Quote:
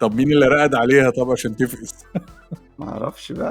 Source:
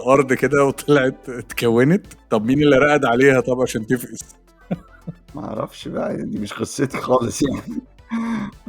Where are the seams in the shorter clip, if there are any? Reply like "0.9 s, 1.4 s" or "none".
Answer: 1.9 s

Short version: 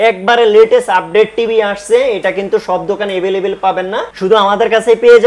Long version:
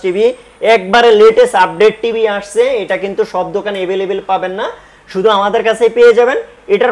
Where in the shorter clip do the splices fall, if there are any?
4.1 s

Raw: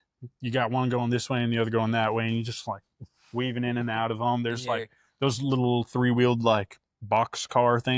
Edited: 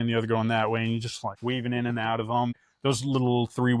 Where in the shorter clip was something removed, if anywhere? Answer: 1.2 s, 2.5 s

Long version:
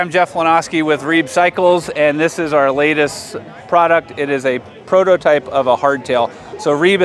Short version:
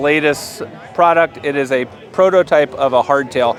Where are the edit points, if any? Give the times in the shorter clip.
none

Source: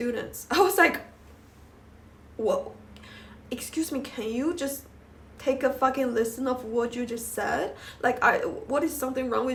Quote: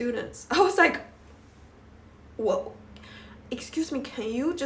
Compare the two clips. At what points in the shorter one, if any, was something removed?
none

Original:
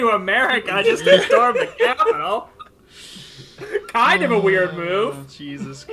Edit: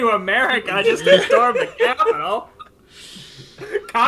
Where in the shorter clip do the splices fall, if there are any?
none

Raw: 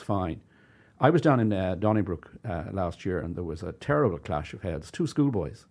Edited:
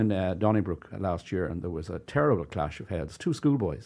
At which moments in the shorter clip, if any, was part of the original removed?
0.9 s

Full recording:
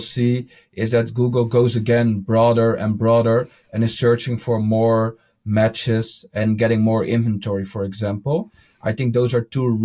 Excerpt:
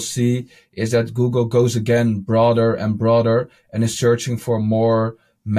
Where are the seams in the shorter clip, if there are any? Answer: none

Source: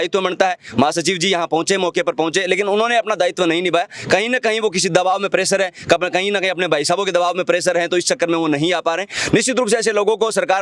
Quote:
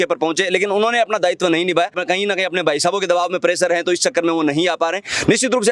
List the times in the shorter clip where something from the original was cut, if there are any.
2.0 s

